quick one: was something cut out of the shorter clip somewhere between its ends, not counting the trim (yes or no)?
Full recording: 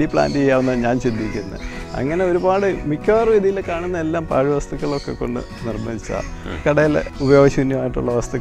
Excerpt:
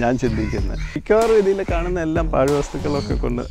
yes